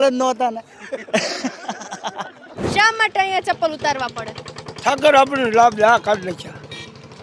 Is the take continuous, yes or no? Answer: no